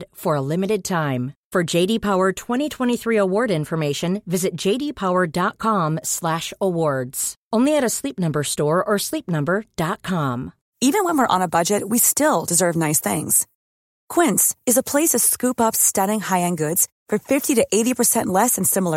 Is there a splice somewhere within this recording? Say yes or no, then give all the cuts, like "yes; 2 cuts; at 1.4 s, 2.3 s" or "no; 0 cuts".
yes; 1 cut; at 10.6 s